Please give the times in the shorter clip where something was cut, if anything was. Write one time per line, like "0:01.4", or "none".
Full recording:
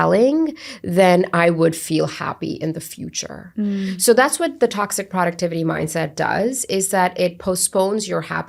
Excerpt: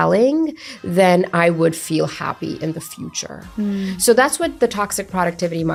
none